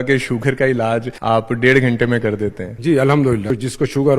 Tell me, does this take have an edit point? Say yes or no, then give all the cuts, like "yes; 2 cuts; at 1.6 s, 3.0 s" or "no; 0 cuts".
yes; 3 cuts; at 1.1 s, 2.7 s, 3.5 s